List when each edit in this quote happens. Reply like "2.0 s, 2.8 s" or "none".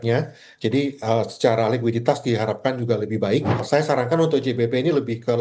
3.6 s

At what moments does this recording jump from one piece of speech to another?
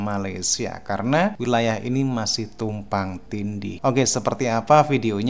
1.4 s, 3.7 s

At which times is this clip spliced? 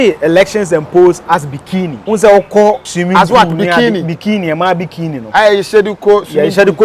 2.0 s, 2.9 s

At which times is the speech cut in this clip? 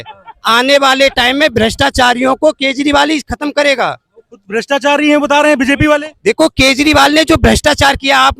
none

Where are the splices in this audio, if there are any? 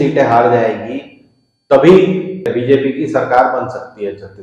2.5 s

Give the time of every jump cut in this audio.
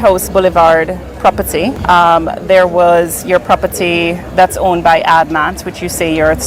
1.8 s

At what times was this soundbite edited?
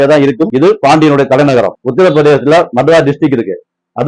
1.7 s

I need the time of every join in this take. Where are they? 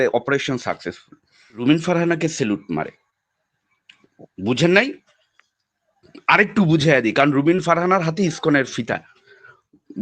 1.6 s

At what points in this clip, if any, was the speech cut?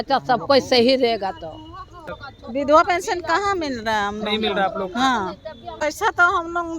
2.1 s, 5.7 s

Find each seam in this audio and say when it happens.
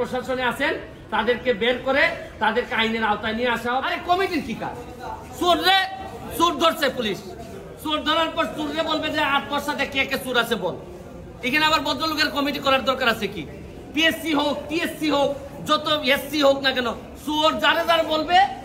3.8 s

